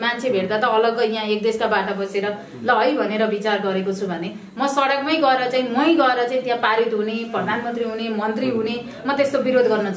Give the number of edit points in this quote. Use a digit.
0